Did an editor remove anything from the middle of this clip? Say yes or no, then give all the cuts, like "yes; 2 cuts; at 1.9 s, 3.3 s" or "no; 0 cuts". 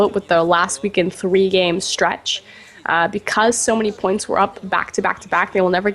yes; 1 cut; at 3.7 s